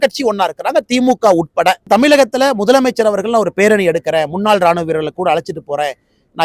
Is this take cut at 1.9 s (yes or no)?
yes